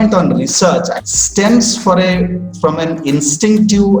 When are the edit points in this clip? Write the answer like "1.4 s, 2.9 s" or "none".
1.0 s